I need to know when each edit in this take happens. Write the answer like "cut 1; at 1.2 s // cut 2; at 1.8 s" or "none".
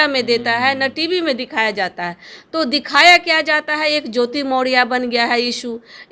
none